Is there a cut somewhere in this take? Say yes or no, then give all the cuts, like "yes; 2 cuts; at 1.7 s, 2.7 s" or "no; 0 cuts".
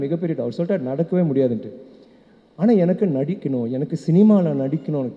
no; 0 cuts